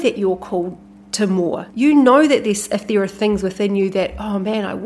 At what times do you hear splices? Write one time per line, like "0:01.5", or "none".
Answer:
0:01.7